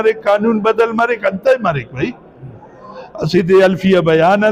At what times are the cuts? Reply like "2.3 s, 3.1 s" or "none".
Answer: none